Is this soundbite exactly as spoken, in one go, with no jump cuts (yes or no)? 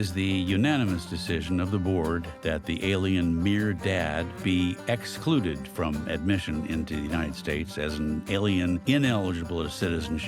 no